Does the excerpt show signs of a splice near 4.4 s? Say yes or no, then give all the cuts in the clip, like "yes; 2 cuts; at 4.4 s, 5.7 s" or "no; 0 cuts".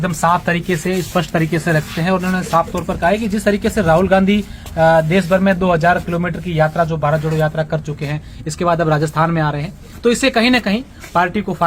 no; 0 cuts